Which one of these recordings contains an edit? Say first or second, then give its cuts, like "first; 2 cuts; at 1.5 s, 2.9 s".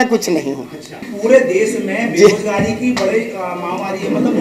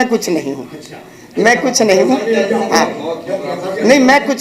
first; 1 cut; at 1.0 s